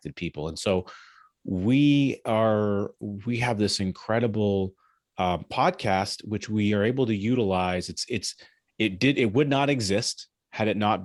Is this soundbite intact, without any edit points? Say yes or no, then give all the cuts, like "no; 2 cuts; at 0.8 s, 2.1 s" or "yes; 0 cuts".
yes; 0 cuts